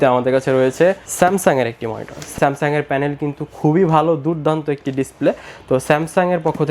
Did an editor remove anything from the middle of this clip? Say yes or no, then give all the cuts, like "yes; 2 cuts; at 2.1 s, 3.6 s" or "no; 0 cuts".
yes; 1 cut; at 1.1 s